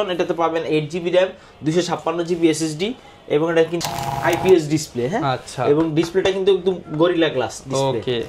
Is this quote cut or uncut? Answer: cut